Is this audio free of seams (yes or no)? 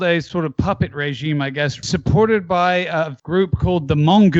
no